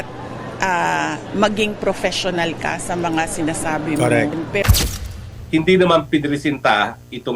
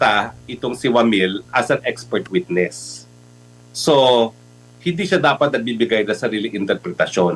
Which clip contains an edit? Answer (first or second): first